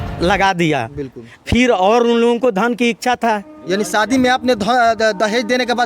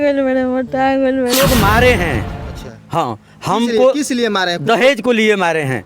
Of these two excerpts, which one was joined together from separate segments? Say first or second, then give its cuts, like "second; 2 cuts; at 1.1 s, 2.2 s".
second; 1 cut; at 1.3 s